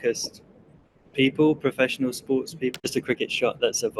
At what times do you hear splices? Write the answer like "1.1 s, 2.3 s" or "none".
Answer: 2.7 s